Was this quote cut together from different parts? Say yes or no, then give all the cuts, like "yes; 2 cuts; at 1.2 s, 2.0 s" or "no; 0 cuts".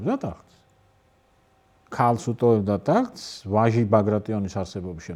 no; 0 cuts